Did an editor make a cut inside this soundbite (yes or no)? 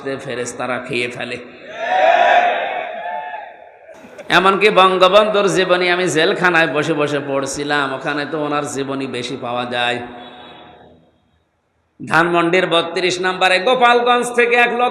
no